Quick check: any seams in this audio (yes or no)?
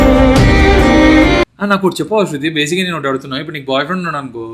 yes